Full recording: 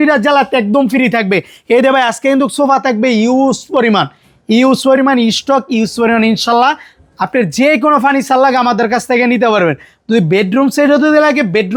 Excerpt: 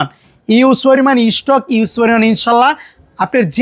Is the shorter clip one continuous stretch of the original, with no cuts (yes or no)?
yes